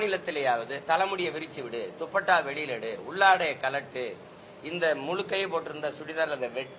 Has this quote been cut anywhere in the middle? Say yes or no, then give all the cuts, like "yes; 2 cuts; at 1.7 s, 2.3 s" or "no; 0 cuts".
no; 0 cuts